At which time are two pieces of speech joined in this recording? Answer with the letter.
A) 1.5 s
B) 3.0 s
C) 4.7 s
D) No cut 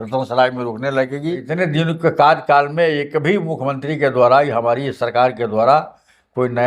A